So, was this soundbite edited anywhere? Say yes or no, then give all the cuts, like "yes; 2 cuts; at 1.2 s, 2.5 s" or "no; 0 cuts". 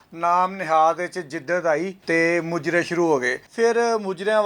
yes; 2 cuts; at 2.0 s, 3.4 s